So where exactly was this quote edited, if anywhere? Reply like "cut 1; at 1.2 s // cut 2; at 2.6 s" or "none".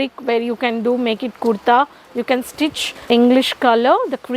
cut 1; at 2.9 s